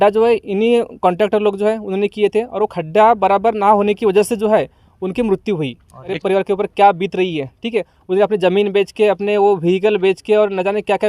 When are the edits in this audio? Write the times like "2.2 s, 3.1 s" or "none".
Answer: 6.2 s